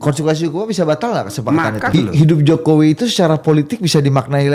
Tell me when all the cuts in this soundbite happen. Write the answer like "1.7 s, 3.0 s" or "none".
1.9 s